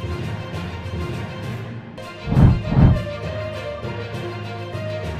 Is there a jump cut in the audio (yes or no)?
yes